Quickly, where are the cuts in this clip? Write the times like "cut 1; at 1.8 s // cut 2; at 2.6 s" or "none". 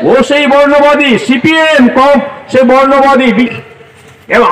cut 1; at 3.5 s